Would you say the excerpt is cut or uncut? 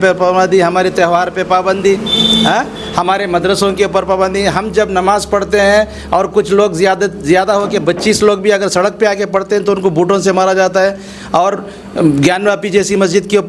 uncut